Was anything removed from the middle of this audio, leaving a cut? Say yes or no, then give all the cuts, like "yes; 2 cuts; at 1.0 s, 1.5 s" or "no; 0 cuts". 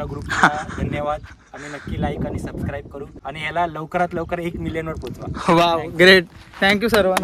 yes; 1 cut; at 3.1 s